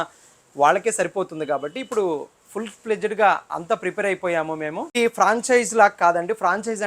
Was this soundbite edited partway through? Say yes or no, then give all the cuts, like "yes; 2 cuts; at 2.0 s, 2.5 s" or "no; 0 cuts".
yes; 1 cut; at 5.0 s